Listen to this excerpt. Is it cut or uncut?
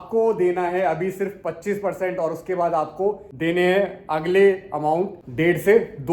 cut